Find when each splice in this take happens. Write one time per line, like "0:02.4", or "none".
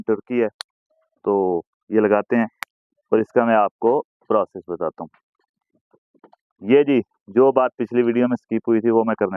none